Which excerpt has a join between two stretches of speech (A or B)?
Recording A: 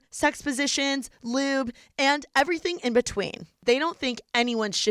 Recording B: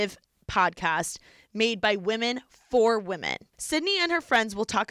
A